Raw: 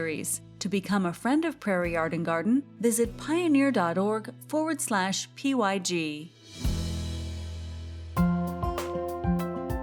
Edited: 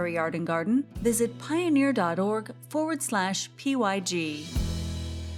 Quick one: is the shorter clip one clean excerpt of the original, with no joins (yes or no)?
no